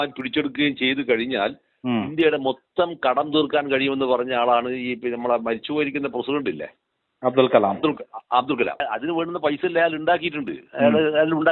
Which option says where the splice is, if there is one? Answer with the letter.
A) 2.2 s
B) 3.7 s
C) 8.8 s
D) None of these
C